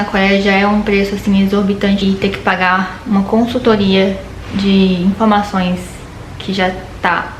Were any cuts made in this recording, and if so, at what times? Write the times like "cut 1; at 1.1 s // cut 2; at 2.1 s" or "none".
cut 1; at 2.0 s

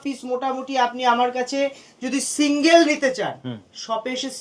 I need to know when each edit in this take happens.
none

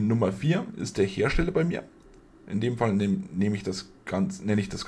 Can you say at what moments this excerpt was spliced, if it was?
none

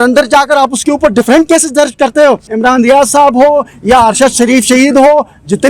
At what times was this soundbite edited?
cut 1; at 2.5 s

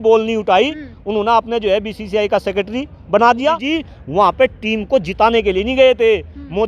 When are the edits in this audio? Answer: cut 1; at 3.6 s

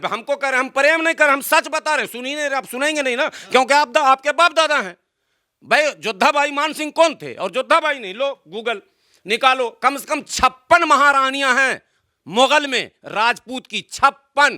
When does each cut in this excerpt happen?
none

